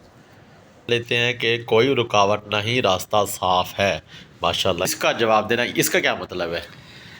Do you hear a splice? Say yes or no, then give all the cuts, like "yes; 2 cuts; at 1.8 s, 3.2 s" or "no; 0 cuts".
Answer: yes; 2 cuts; at 0.9 s, 4.9 s